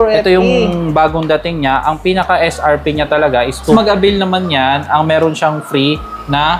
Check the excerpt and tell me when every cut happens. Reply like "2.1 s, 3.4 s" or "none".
3.7 s